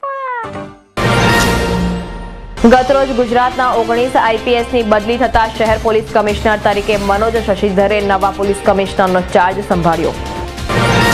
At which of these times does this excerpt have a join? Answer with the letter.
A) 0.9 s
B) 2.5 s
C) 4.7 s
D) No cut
A